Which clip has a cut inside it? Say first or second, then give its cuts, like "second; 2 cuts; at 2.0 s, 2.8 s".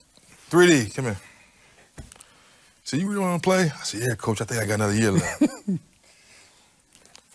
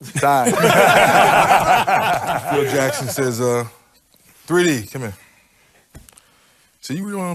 second; 1 cut; at 2.7 s